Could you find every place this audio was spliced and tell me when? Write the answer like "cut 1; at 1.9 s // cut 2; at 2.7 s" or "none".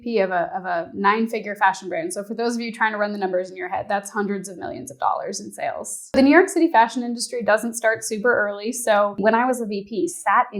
cut 1; at 6.1 s // cut 2; at 9.2 s